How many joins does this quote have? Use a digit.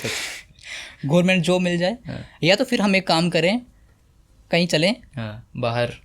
0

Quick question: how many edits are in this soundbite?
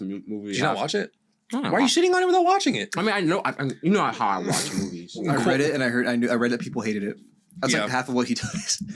1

